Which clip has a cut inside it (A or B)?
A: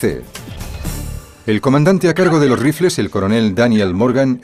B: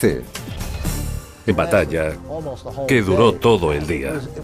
A